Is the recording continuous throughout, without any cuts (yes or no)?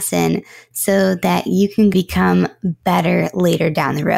no